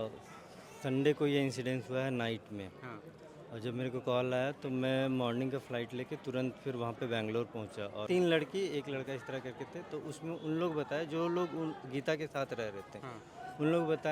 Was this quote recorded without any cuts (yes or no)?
no